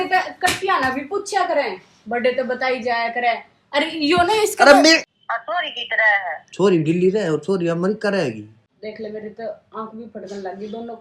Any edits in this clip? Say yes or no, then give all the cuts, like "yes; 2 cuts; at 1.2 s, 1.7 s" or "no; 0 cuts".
yes; 2 cuts; at 5.1 s, 8.6 s